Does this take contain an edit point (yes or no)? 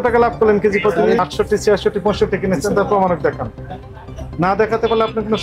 yes